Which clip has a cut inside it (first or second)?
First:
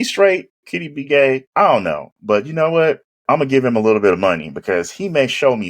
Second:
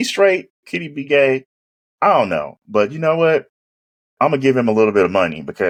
first